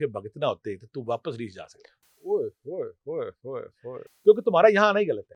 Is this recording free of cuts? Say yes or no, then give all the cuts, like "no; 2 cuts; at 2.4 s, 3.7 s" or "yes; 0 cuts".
yes; 0 cuts